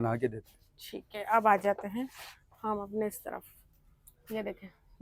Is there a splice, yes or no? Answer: no